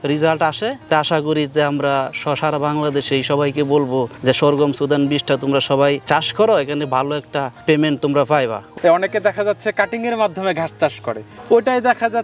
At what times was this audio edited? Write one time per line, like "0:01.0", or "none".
0:08.7